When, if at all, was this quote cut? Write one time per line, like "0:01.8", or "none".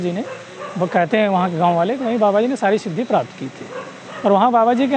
none